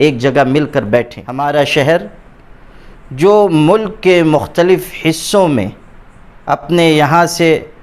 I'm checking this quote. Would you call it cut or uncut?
cut